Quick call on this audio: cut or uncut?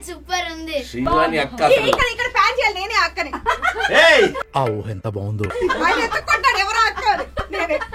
uncut